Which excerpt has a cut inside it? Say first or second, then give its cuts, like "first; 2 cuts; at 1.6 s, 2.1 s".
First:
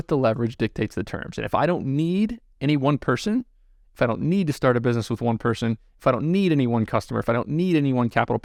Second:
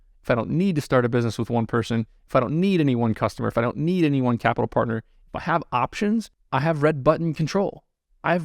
second; 1 cut; at 6.4 s